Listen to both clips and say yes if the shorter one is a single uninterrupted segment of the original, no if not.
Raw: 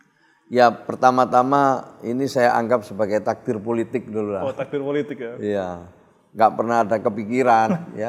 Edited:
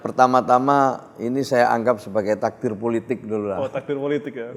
yes